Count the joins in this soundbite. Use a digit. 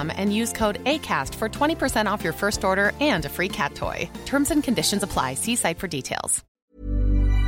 1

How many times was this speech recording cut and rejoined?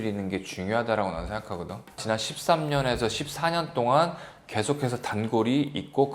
1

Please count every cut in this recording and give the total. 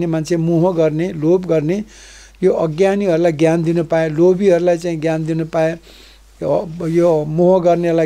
0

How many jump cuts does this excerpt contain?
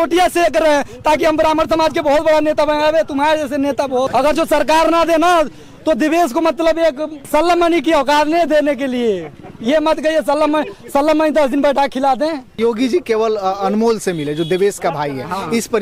3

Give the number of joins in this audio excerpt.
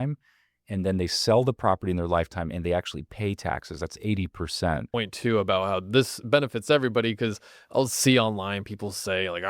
1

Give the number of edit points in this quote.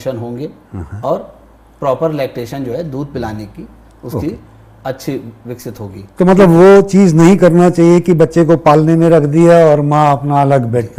0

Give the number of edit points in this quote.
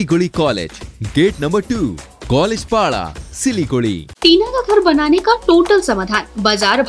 1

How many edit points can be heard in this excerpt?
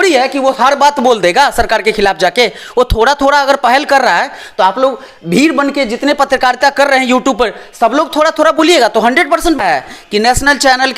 1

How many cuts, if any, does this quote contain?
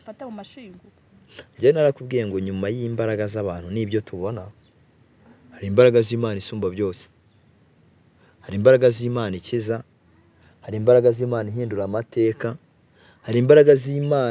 0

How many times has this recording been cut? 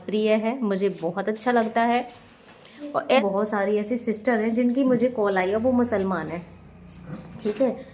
1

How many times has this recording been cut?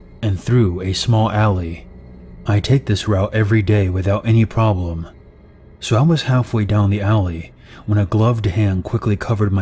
1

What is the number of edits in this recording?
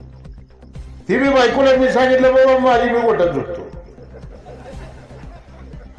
1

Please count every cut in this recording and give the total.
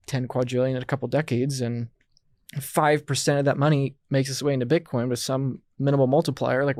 0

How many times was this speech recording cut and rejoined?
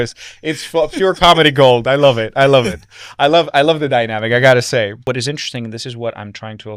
1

